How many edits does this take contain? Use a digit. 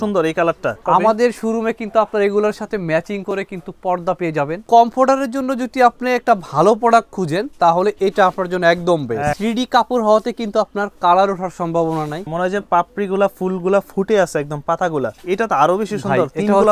5